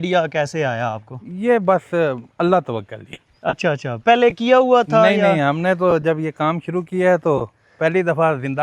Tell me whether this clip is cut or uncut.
uncut